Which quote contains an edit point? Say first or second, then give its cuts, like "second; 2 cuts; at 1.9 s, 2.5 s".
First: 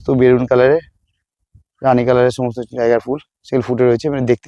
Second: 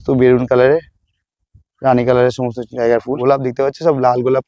second; 1 cut; at 3.1 s